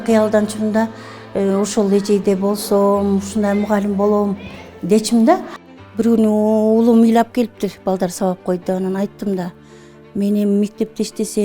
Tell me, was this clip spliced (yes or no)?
yes